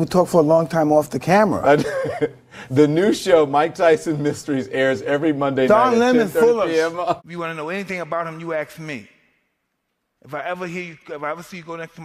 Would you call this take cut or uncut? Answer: cut